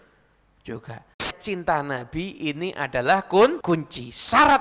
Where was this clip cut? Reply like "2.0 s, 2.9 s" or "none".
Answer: 1.4 s, 3.6 s